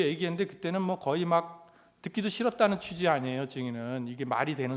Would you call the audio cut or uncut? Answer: uncut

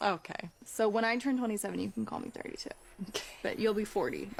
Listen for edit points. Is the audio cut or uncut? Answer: uncut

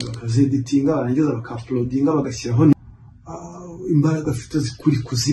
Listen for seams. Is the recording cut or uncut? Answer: cut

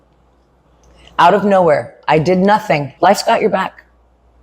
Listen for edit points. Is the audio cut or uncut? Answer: cut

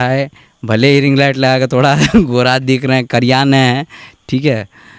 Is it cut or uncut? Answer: uncut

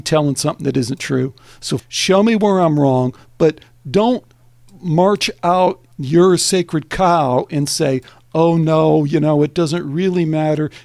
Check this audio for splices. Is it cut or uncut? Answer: cut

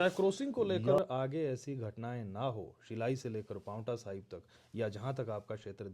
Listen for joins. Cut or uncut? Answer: cut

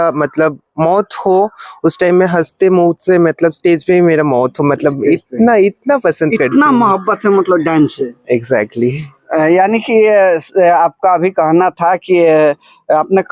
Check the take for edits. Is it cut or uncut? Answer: uncut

